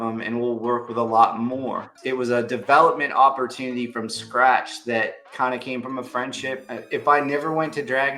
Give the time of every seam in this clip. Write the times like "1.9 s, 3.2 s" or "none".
1.9 s, 5.2 s, 6.7 s